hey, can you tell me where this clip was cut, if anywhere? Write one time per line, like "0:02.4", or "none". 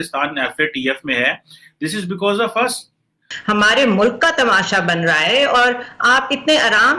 0:03.3